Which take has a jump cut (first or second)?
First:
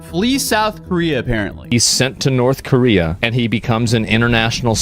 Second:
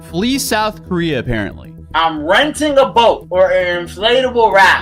first